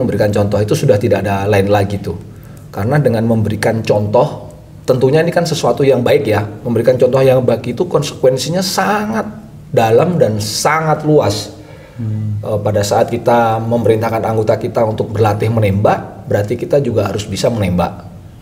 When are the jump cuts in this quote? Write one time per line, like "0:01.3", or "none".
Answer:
0:06.6